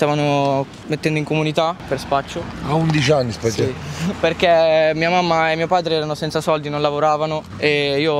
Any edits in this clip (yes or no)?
yes